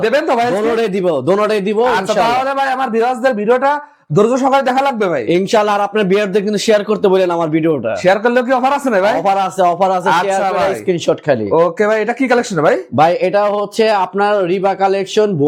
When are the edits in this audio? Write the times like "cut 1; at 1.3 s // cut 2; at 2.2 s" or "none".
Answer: none